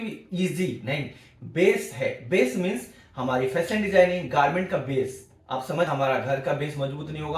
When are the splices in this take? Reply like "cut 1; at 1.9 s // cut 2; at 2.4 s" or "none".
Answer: cut 1; at 5.9 s